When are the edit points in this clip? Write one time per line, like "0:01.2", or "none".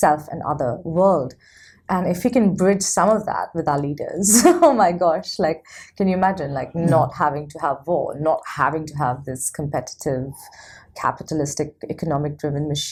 none

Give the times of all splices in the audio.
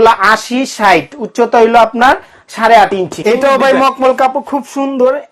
0:03.2

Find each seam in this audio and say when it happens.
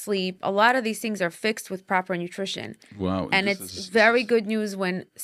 none

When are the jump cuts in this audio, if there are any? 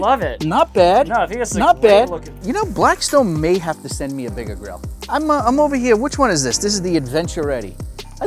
0:02.4
0:05.0

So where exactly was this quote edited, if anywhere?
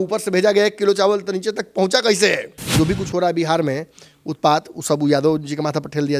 0:02.6

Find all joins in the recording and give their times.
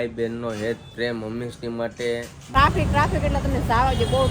0:02.5

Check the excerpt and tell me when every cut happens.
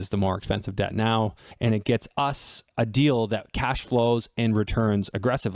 0:01.5

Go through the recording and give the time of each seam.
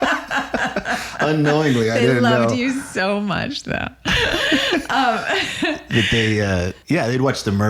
0:06.8

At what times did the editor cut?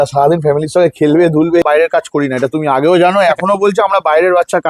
0:01.6

